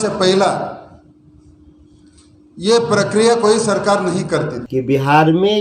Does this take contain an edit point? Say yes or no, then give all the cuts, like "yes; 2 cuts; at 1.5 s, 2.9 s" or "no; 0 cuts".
yes; 1 cut; at 4.6 s